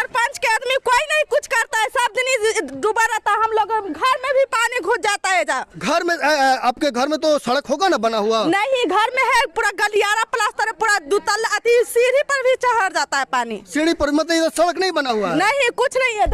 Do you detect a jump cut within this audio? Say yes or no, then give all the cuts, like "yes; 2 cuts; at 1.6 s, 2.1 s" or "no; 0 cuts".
no; 0 cuts